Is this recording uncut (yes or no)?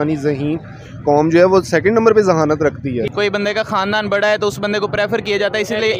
no